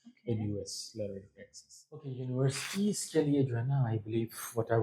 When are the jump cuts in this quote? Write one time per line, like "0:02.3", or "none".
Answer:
0:02.2